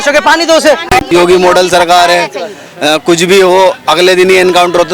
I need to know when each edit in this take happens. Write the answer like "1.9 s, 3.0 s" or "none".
1.1 s